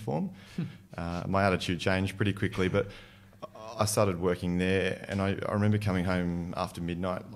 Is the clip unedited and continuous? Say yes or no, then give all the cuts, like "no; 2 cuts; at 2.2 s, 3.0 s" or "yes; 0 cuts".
yes; 0 cuts